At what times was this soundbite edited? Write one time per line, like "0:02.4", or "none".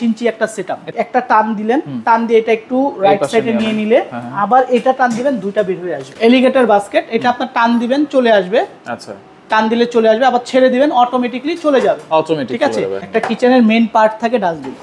0:00.9
0:06.0
0:13.0